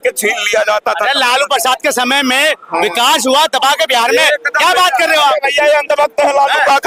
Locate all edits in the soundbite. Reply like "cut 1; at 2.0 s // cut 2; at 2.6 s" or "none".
none